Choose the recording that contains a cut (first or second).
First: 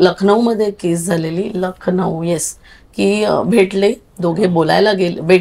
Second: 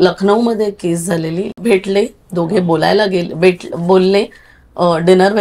second